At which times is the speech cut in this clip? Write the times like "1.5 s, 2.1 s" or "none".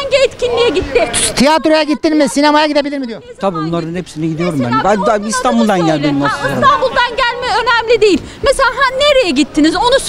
none